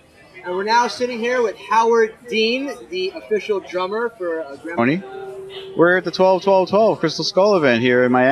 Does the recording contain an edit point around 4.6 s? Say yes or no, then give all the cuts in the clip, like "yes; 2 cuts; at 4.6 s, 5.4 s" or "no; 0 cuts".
no; 0 cuts